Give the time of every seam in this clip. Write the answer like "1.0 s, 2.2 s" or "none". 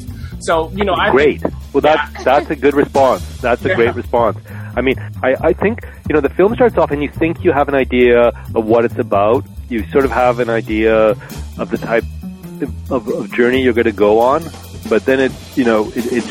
none